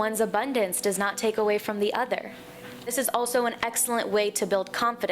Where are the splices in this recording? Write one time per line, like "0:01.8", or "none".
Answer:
0:02.9